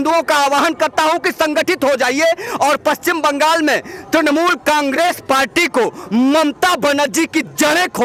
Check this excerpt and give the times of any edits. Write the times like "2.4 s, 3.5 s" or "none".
none

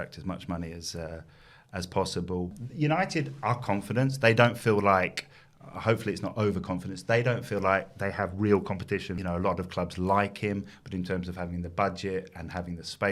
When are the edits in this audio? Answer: 2.6 s, 9.2 s

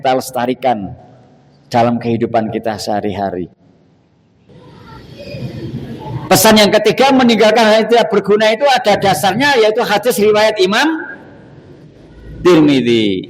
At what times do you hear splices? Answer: 4.5 s

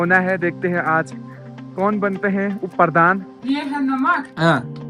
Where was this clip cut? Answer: 3.3 s

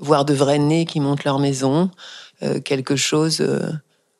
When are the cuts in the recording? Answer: none

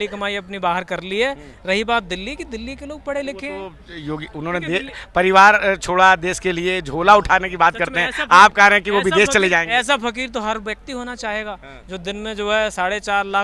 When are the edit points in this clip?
none

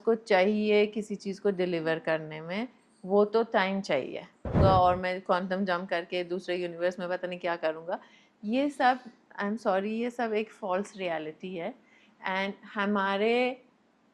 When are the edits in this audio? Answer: 4.5 s

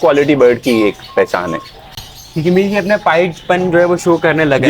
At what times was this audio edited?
none

